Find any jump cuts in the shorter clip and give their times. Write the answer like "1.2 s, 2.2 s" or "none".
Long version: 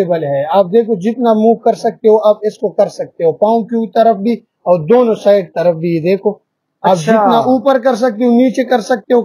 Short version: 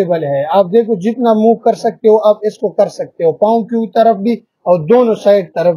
none